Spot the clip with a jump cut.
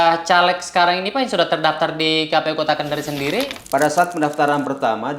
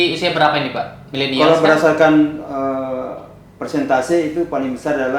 first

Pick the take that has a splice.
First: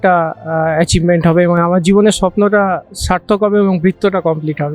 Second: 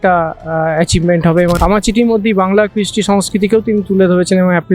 second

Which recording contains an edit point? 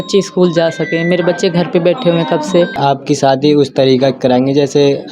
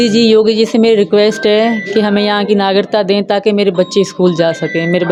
first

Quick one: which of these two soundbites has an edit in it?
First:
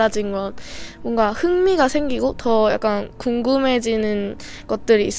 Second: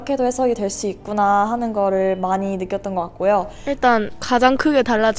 second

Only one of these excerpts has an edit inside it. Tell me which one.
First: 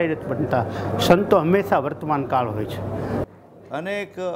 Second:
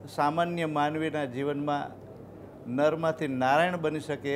first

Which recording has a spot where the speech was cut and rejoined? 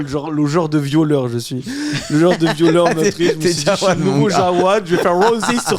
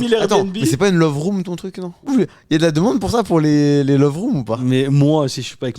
second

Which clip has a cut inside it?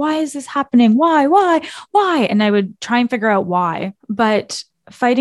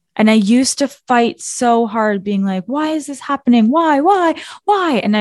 first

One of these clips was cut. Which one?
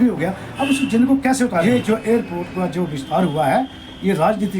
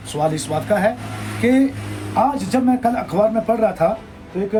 first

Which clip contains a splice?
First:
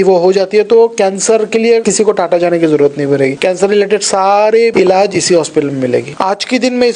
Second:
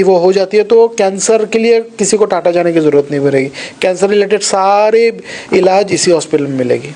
first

